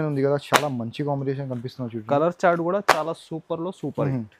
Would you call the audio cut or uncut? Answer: uncut